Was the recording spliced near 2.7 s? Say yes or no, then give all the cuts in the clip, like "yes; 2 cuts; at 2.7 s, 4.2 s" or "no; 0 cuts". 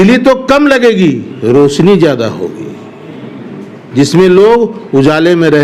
no; 0 cuts